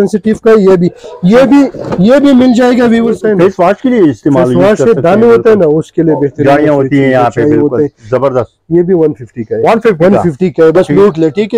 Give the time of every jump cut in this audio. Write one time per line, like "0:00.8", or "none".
0:03.2